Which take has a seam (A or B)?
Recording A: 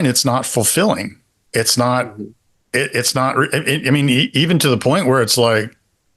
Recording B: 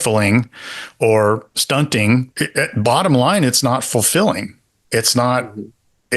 B